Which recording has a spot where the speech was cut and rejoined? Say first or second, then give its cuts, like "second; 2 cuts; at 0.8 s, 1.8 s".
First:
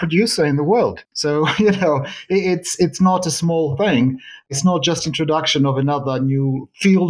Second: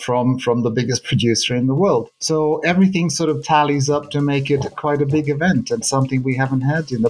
first; 1 cut; at 4.5 s